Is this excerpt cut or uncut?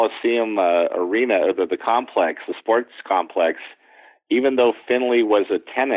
uncut